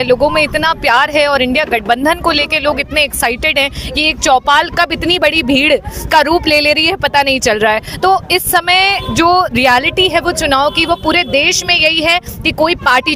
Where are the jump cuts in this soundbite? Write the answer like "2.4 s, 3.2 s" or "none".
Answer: none